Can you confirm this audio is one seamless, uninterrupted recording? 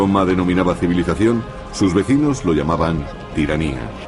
yes; 0 cuts

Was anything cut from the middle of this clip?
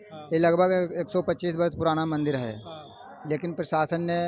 no; 0 cuts

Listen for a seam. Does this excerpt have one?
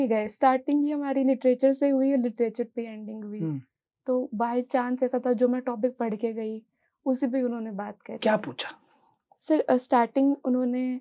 no; 0 cuts

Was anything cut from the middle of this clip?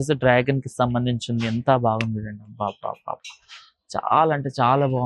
no; 0 cuts

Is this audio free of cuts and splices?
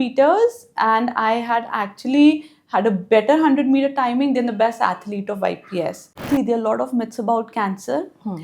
no; 1 cut; at 6.1 s

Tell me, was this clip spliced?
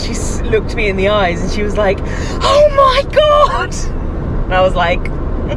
no; 0 cuts

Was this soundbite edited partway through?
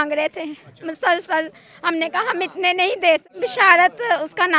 yes; 1 cut; at 3.3 s

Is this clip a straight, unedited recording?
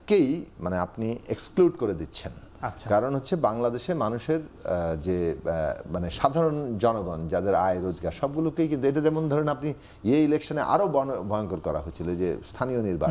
yes; 0 cuts

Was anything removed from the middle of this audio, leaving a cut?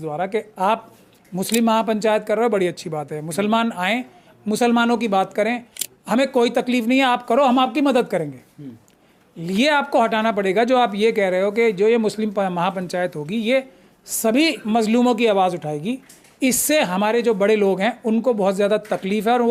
no; 0 cuts

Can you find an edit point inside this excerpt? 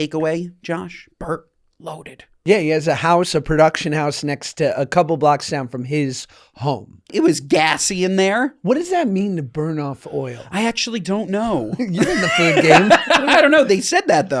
yes; 2 cuts; at 2.3 s, 7.1 s

